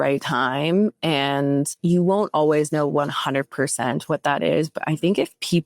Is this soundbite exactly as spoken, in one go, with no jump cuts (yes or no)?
no